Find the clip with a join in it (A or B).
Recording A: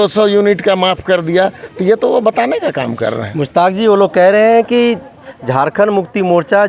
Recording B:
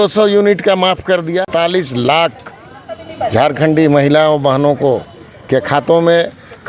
B